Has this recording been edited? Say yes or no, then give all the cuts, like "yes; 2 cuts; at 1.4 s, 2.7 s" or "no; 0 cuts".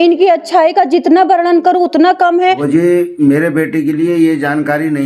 yes; 1 cut; at 2.6 s